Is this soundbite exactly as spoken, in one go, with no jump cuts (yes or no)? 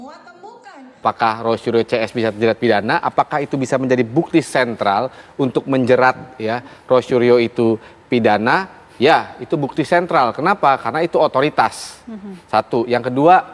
no